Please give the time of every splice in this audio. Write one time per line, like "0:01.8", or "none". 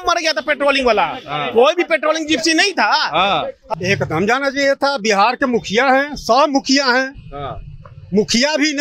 0:03.6